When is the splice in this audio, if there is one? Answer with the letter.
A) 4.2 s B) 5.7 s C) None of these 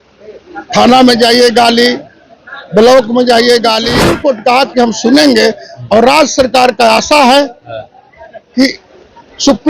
A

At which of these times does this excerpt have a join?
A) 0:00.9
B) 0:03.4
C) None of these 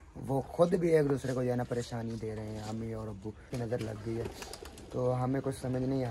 B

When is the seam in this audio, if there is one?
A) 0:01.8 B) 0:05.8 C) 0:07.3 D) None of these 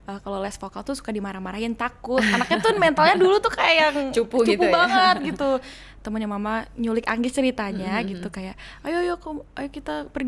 B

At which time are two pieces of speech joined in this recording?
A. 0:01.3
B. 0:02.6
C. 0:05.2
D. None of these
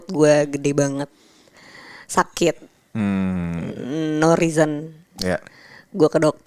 D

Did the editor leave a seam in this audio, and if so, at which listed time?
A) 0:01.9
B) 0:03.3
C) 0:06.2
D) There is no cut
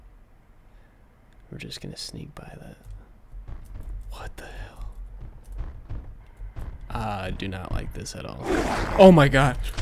B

